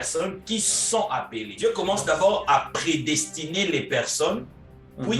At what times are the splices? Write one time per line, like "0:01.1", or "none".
0:01.5

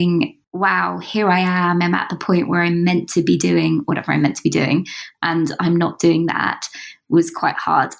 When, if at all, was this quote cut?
none

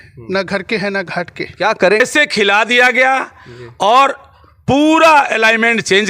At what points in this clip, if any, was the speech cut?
0:02.0

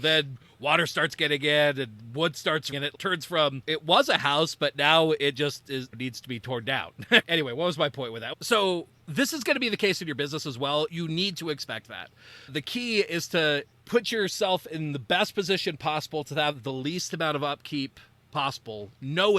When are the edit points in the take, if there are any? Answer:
0:02.7

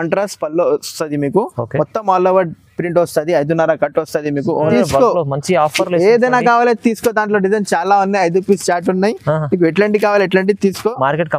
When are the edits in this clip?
0:04.7

